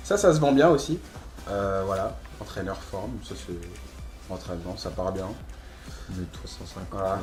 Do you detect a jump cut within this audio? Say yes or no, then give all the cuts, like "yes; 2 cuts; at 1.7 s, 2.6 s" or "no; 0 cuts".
no; 0 cuts